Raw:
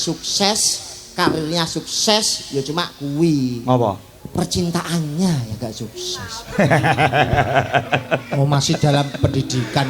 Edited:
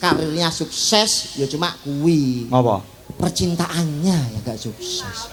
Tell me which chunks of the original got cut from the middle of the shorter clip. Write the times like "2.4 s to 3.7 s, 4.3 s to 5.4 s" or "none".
none